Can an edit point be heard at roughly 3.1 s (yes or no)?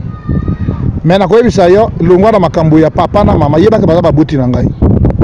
no